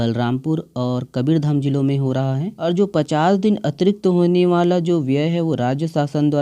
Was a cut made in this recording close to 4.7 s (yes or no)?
no